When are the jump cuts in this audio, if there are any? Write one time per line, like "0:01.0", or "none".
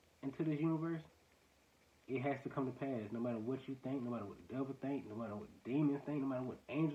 none